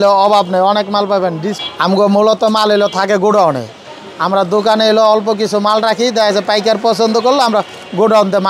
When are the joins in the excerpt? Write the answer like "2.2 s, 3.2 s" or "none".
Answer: 1.5 s